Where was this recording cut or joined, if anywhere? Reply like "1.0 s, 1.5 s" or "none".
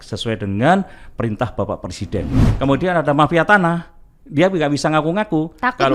2.5 s